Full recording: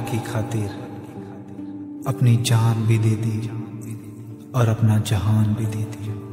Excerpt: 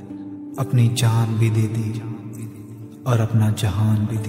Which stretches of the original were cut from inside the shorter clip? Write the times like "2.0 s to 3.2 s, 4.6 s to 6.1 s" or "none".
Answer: none